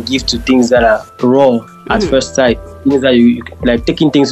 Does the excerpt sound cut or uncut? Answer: cut